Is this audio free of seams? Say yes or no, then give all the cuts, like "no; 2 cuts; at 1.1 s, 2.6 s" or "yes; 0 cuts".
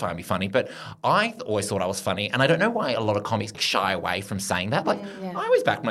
no; 1 cut; at 3.5 s